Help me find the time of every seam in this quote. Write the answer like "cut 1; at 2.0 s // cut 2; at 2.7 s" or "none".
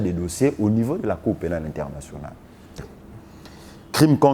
cut 1; at 2.8 s